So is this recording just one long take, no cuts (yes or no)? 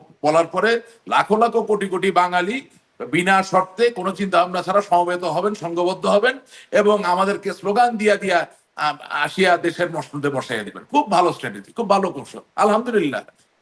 yes